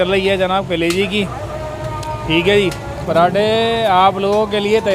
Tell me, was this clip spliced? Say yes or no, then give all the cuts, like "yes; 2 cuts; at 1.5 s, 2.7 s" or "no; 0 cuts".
yes; 1 cut; at 3.0 s